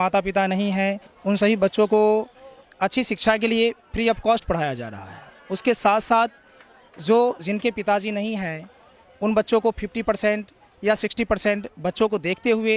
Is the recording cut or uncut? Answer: cut